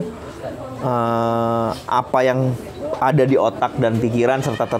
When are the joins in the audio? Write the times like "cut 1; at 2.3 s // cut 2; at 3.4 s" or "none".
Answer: none